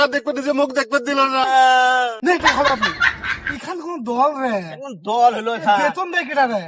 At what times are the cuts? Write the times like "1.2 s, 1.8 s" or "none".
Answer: 2.2 s